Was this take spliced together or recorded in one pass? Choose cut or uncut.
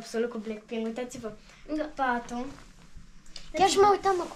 uncut